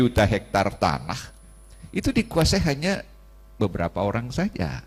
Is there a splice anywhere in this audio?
no; 0 cuts

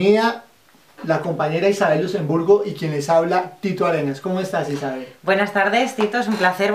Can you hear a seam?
no; 0 cuts

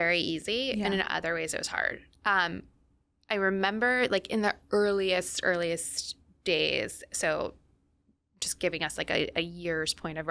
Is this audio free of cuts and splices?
yes; 0 cuts

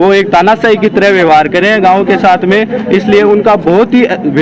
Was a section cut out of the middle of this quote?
no; 0 cuts

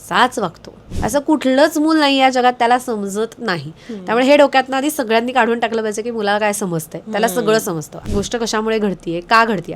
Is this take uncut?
no; 2 cuts; at 0.9 s, 8.1 s

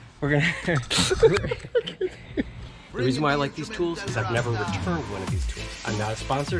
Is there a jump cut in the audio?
yes; 1 cut; at 2.7 s

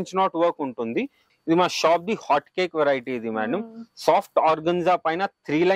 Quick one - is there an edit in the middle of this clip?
yes; 1 cut; at 1.2 s

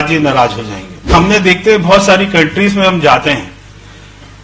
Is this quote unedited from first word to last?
no; 1 cut; at 1.1 s

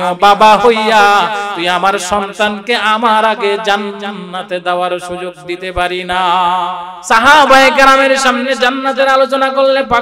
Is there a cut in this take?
no; 0 cuts

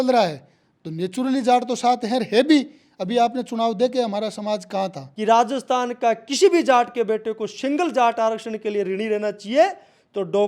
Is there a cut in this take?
yes; 1 cut; at 5.1 s

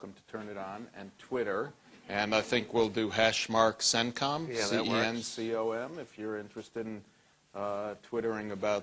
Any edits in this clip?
no; 0 cuts

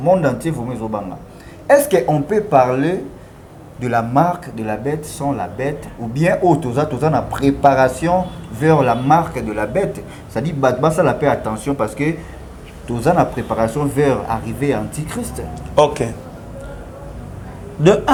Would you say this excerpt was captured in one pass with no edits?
yes; 0 cuts

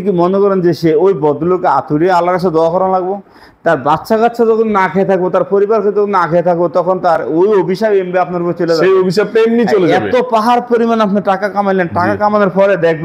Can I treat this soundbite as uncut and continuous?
yes; 0 cuts

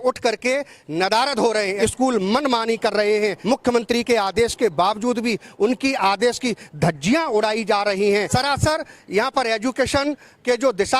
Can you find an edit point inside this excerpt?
yes; 3 cuts; at 1.7 s, 3.4 s, 8.3 s

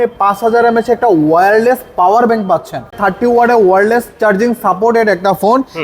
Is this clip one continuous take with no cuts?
no; 1 cut; at 2.9 s

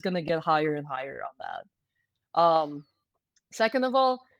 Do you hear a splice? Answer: no; 0 cuts

